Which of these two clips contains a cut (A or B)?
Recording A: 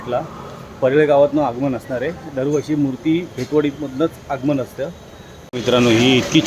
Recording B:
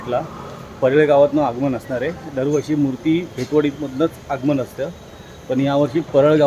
A